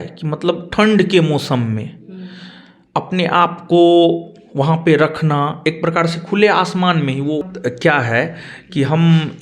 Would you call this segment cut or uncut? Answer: cut